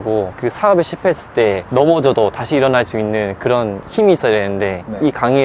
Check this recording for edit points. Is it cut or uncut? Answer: uncut